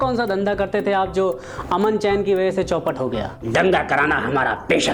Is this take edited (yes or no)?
yes